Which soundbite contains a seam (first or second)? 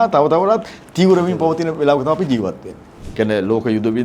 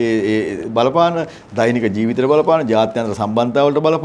first